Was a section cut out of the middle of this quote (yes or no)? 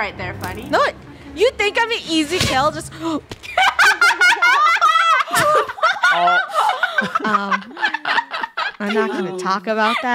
no